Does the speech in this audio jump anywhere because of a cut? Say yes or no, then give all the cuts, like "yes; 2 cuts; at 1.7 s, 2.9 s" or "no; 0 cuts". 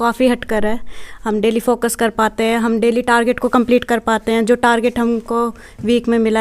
no; 0 cuts